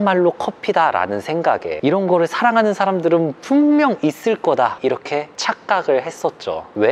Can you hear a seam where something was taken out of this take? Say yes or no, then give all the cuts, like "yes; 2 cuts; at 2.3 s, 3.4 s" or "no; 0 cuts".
yes; 1 cut; at 1.7 s